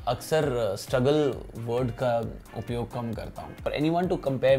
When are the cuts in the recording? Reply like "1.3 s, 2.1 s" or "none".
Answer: 3.6 s